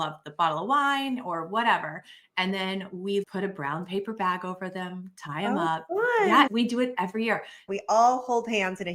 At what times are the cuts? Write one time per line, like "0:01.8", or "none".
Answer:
0:03.2
0:06.5
0:07.6